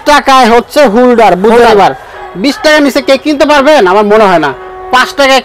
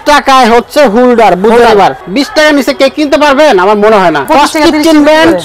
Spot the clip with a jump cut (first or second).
second